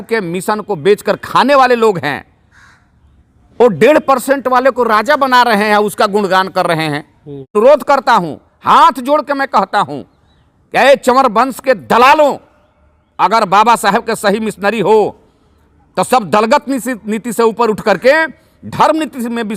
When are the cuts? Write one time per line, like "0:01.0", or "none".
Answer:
0:07.5

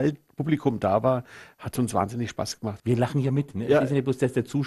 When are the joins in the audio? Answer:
0:02.8

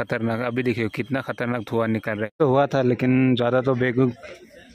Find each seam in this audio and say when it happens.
0:02.3

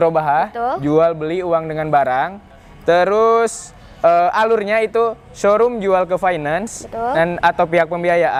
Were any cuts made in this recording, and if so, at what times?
none

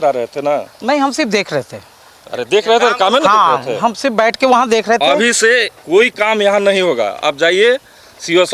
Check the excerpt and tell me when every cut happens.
none

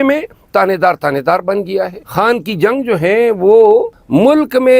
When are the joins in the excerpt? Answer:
0:02.0

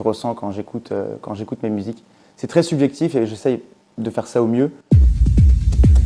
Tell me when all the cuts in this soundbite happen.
0:04.8

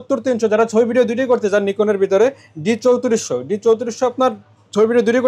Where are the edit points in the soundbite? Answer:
none

